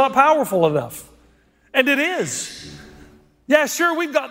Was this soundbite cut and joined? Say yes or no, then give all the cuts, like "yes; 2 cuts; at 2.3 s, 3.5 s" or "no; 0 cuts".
no; 0 cuts